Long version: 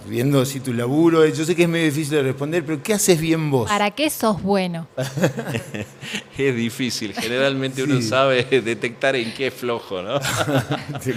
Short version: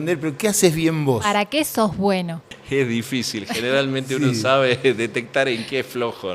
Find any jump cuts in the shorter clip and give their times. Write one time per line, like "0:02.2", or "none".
0:02.4